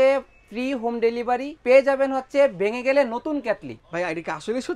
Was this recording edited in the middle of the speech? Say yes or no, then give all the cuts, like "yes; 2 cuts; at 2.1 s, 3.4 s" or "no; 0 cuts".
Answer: yes; 2 cuts; at 1.5 s, 3.8 s